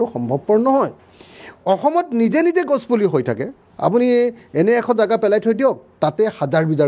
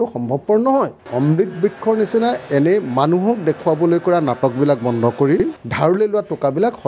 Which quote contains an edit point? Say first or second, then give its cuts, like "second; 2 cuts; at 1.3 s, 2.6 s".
second; 2 cuts; at 1.1 s, 5.5 s